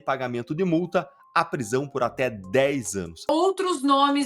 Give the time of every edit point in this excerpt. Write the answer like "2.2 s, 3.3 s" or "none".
3.2 s